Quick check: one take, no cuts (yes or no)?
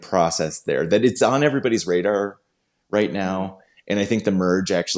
no